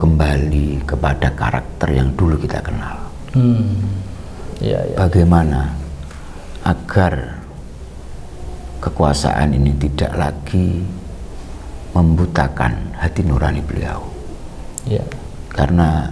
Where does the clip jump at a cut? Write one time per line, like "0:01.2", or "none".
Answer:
0:14.3